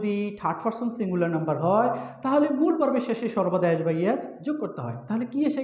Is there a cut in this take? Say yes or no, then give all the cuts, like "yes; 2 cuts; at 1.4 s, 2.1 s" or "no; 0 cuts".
no; 0 cuts